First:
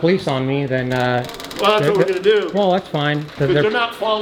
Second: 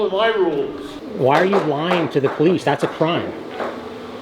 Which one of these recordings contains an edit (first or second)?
second